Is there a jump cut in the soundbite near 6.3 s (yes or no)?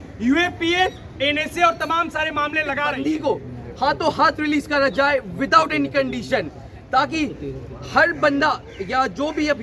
no